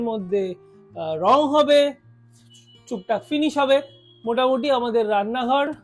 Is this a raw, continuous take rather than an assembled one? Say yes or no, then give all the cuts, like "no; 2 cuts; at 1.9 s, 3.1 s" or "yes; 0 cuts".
yes; 0 cuts